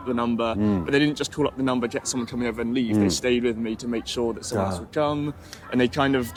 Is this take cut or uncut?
uncut